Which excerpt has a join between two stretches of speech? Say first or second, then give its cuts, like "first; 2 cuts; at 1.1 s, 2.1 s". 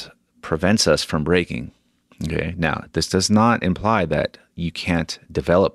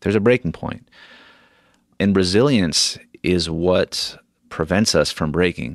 second; 1 cut; at 1.9 s